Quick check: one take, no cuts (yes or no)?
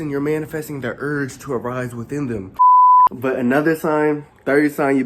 no